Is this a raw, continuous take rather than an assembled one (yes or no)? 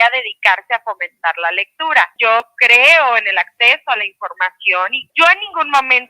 no